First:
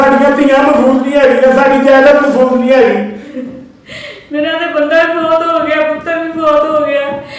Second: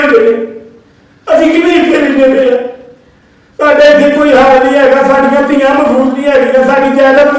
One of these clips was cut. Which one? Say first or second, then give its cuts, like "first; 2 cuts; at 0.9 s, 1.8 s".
first; 1 cut; at 3.3 s